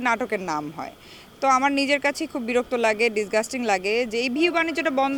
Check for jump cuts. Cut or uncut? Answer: uncut